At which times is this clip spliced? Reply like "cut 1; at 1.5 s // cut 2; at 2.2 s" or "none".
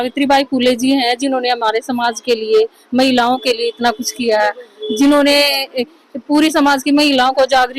none